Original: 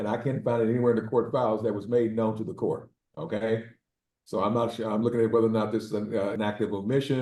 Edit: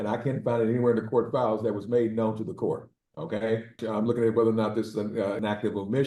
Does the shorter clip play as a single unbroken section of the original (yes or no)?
no